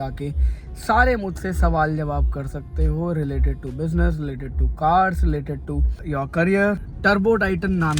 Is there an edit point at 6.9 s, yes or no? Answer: yes